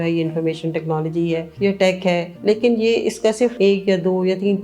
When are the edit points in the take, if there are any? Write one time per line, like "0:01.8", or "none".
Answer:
0:01.5
0:02.3
0:03.5